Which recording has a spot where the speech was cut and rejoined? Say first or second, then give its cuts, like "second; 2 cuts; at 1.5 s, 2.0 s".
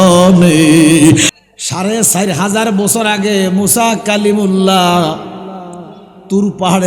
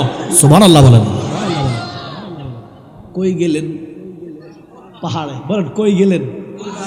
first; 1 cut; at 1.3 s